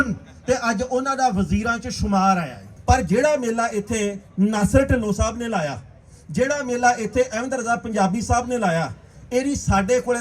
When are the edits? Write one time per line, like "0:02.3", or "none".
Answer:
0:02.7
0:09.1